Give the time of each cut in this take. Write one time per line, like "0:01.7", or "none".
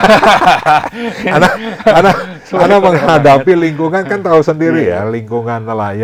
none